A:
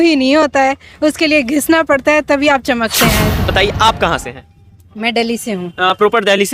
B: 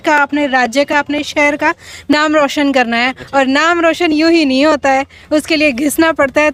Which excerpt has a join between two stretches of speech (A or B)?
A